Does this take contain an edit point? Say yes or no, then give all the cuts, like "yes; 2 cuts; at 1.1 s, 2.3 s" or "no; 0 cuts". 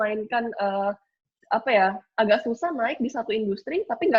no; 0 cuts